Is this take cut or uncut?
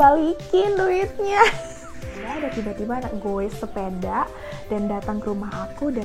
cut